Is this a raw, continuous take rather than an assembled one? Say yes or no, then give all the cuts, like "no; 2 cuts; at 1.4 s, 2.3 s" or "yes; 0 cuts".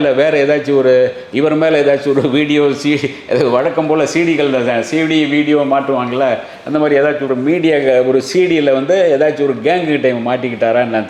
yes; 0 cuts